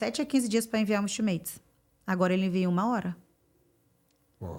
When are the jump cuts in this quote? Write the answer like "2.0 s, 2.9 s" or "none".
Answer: none